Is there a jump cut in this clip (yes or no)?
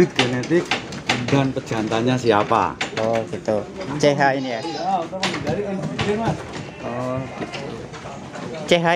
no